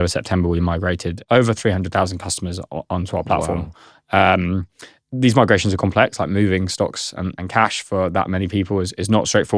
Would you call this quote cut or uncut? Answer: cut